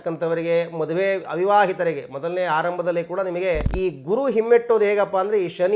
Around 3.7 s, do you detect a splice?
yes; 1 cut; at 3.7 s

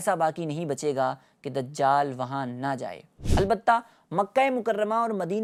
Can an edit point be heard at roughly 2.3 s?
no; 0 cuts

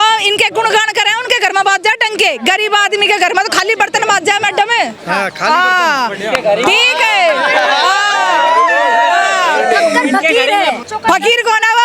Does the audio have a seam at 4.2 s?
no; 1 cut; at 10.9 s

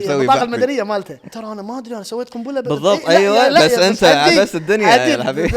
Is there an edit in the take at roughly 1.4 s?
yes; 1 cut; at 1.4 s

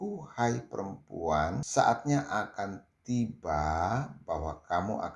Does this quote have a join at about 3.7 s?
no; 1 cut; at 1.6 s

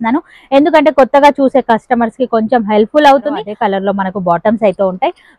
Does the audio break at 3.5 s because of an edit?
yes; 1 cut; at 3.5 s

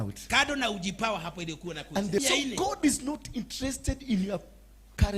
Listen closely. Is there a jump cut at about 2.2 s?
yes; 1 cut; at 2.2 s

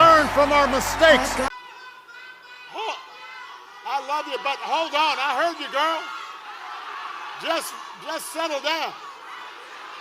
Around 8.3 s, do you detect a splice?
no; 1 cut; at 1.3 s

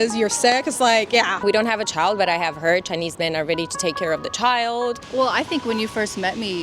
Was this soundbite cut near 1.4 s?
yes; 2 cuts; at 1.4 s, 5.0 s

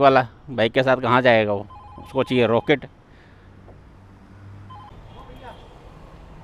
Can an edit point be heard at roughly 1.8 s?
no; 1 cut; at 4.9 s

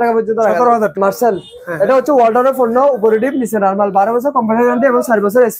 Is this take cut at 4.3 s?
no; 1 cut; at 0.9 s

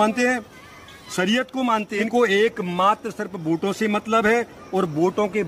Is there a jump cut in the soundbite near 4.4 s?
no; 1 cut; at 2.1 s

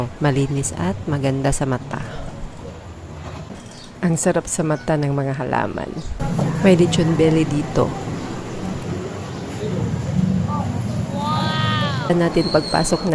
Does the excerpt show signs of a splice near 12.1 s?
yes; 3 cuts; at 3.5 s, 6.2 s, 12.1 s

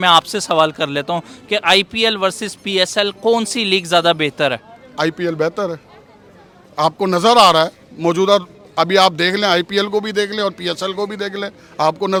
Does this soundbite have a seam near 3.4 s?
no; 0 cuts

